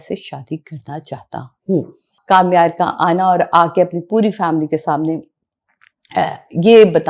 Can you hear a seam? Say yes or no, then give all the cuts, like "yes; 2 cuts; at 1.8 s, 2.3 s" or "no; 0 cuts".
yes; 1 cut; at 2.1 s